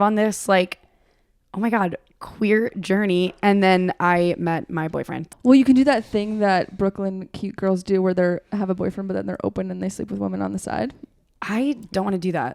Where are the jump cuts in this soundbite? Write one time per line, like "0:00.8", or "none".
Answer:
0:05.2